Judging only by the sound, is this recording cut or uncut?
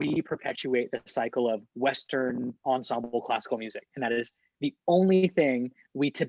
uncut